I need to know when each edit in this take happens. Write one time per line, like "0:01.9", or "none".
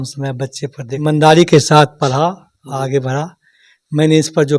0:01.0